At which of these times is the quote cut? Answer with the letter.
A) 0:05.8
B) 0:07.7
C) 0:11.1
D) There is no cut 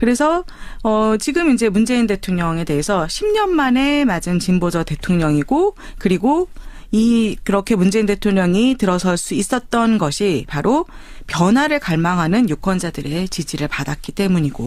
A